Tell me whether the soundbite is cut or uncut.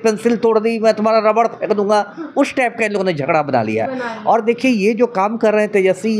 uncut